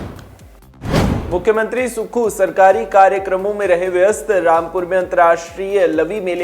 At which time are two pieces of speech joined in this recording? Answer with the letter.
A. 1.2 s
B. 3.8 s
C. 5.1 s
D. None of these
A